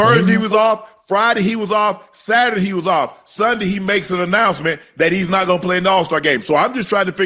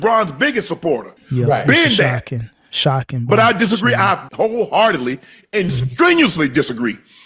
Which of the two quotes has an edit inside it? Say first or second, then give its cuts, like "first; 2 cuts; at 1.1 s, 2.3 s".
second; 2 cuts; at 1.2 s, 4.2 s